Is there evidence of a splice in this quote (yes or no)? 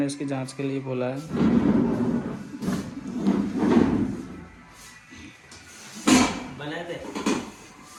no